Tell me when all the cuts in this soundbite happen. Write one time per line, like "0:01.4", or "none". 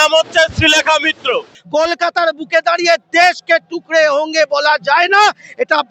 0:01.5